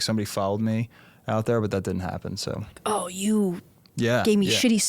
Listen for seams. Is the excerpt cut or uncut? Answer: uncut